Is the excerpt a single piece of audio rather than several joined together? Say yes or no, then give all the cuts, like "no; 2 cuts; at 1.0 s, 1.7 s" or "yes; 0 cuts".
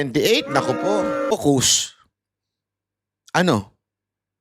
no; 1 cut; at 1.3 s